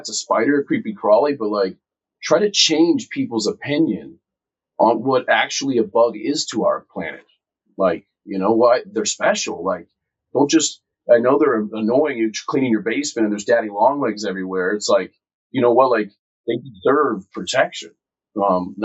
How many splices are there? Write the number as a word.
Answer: one